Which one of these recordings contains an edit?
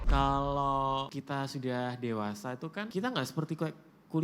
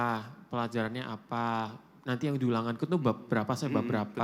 first; 2 cuts; at 1.2 s, 2.9 s

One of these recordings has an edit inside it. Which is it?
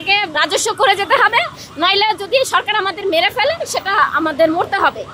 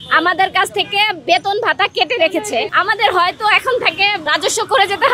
second; 1 cut; at 2.7 s

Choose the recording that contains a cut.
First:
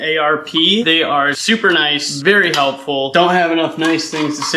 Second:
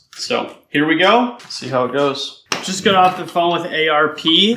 second; 1 cut; at 2.3 s

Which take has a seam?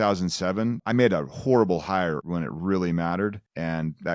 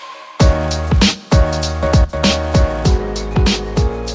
first; 2 cuts; at 0.8 s, 2.2 s

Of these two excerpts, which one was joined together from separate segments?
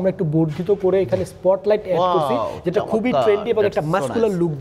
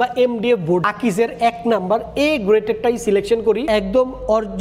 second; 2 cuts; at 0.9 s, 3.7 s

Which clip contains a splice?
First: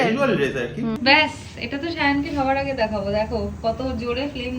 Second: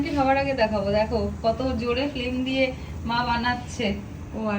first; 1 cut; at 1.0 s

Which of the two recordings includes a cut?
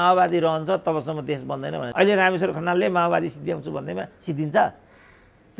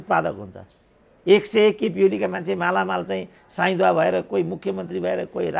first; 1 cut; at 1.8 s

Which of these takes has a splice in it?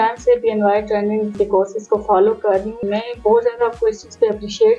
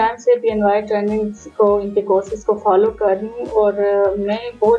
first; 2 cuts; at 1.3 s, 2.8 s

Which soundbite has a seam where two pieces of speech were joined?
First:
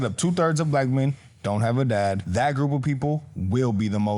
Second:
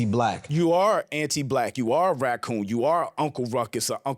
first; 1 cut; at 2.2 s

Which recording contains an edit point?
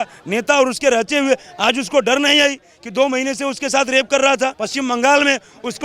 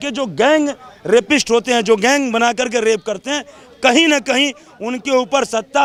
first; 1 cut; at 4.6 s

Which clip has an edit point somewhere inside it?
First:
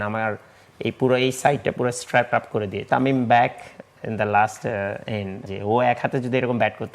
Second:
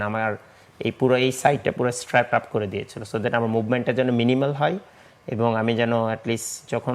first; 2 cuts; at 2.9 s, 5.4 s

